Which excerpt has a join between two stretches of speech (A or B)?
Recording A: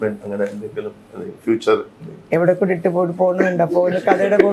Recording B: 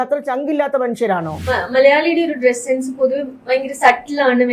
B